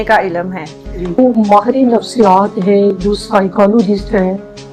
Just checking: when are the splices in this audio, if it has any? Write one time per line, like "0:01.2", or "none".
0:01.2